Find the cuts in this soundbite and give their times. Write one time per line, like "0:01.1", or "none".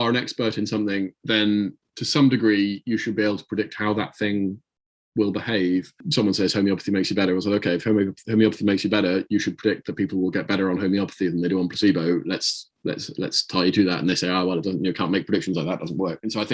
0:01.2
0:05.9